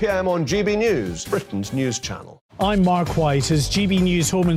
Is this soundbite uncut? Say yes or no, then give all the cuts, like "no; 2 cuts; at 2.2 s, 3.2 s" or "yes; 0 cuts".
yes; 0 cuts